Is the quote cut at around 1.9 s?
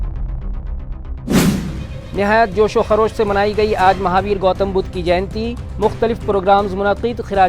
yes; 1 cut; at 1.9 s

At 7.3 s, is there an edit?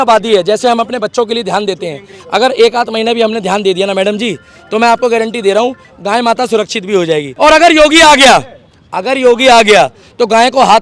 yes; 1 cut; at 7.3 s

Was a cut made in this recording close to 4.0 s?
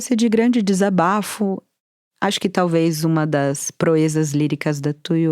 no; 1 cut; at 1.7 s

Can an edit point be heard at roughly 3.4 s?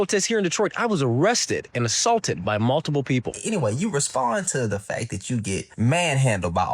yes; 1 cut; at 3.4 s

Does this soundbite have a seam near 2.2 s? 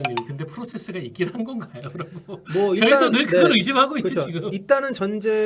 no; 0 cuts

